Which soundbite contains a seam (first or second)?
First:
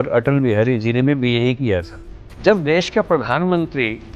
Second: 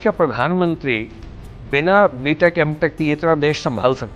first